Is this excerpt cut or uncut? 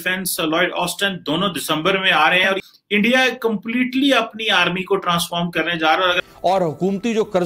cut